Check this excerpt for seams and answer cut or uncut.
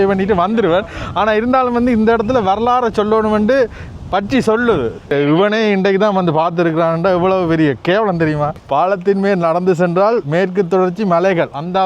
cut